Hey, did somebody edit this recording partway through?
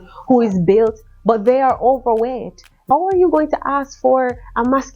yes; 1 cut; at 2.8 s

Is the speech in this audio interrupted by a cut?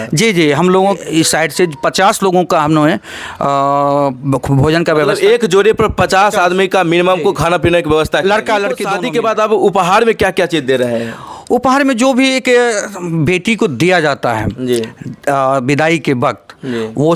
yes; 2 cuts; at 1.0 s, 8.9 s

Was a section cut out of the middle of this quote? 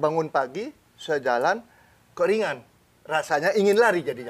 no; 0 cuts

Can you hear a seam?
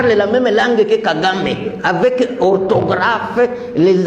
no; 0 cuts

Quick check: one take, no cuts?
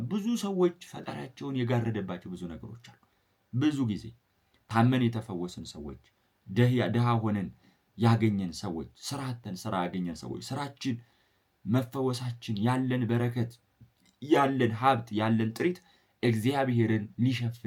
yes; 0 cuts

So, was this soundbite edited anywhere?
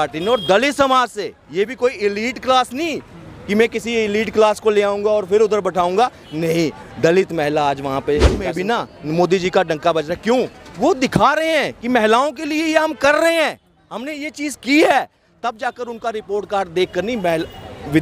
yes; 1 cut; at 8.4 s

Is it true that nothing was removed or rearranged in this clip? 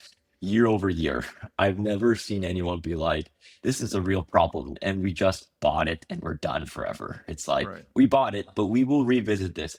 yes; 0 cuts

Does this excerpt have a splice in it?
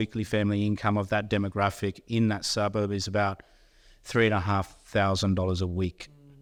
no; 0 cuts

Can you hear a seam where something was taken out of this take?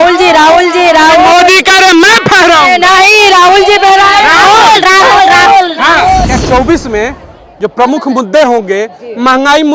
yes; 1 cut; at 6.2 s

